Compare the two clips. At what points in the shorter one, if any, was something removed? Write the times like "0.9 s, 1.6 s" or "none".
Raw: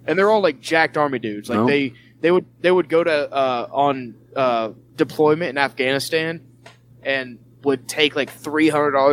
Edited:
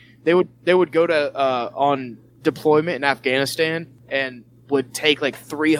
2.2 s, 3.9 s